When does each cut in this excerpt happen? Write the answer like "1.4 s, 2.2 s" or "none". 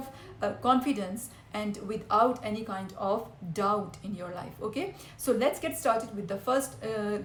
none